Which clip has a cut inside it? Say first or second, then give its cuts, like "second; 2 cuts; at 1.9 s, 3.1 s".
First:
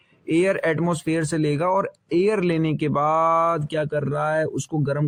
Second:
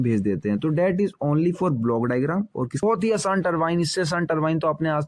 second; 1 cut; at 2.8 s